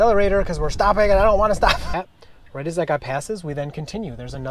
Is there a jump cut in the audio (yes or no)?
yes